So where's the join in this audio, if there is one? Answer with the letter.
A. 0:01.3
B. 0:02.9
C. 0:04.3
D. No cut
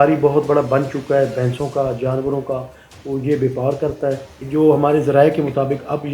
C